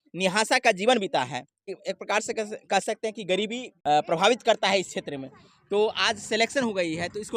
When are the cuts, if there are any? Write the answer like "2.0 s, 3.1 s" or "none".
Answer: 1.7 s, 3.7 s